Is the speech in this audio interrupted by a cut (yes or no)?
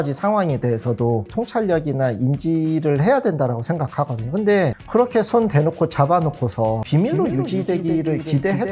no